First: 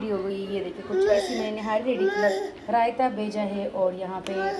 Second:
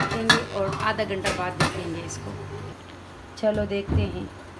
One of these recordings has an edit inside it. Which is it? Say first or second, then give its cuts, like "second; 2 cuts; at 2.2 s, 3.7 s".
second; 1 cut; at 2.6 s